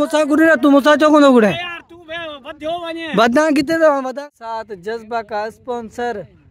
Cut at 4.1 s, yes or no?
yes